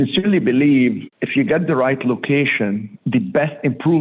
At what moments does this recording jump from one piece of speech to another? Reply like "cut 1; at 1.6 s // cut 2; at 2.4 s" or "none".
cut 1; at 1.1 s // cut 2; at 2.9 s